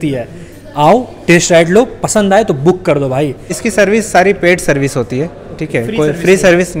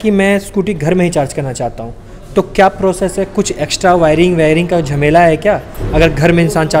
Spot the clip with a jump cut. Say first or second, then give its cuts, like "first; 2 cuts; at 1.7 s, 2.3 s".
first; 1 cut; at 3.6 s